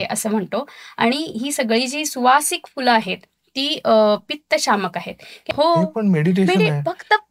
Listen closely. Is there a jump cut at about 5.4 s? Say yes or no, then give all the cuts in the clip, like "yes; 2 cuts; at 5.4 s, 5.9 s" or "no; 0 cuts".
yes; 1 cut; at 5.4 s